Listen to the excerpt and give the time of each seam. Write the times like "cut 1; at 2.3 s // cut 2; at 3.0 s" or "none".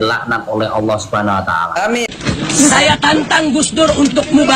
cut 1; at 2.0 s